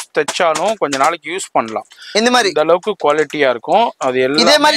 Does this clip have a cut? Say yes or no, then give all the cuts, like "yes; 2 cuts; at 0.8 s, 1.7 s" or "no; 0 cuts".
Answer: no; 0 cuts